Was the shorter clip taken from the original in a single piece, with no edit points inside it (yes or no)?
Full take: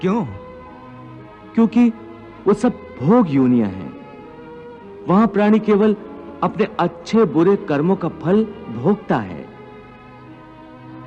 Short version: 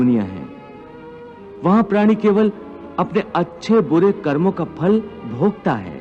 yes